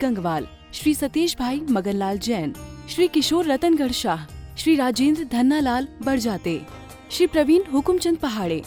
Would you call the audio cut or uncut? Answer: uncut